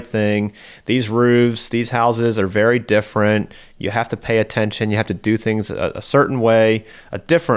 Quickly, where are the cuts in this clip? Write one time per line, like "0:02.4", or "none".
none